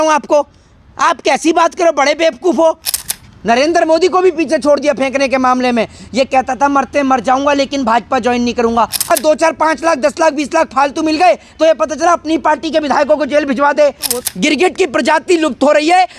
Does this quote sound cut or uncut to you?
cut